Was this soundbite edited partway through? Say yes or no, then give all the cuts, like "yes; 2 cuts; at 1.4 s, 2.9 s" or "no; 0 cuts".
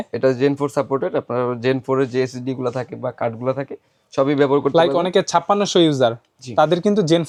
no; 0 cuts